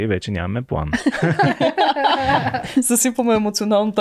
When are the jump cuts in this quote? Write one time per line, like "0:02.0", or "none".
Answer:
0:02.7